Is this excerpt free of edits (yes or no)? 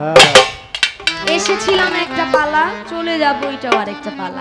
yes